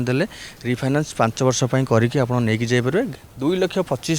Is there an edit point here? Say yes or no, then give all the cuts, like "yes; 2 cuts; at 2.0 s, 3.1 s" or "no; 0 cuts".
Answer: yes; 1 cut; at 3.1 s